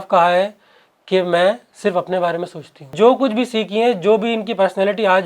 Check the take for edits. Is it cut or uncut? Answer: cut